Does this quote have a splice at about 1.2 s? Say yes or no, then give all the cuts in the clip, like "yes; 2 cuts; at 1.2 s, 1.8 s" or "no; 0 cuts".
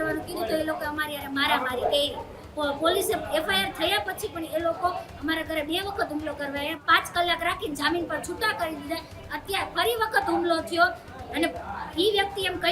no; 3 cuts; at 2.4 s, 6.8 s, 11.1 s